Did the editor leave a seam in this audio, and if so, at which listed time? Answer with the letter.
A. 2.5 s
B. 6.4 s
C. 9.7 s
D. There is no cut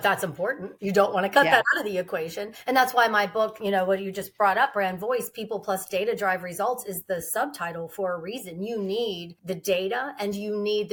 D